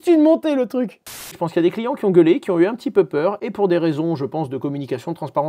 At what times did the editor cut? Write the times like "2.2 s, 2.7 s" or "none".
1.3 s